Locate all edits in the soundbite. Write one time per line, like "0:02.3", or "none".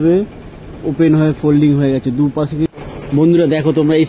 0:02.7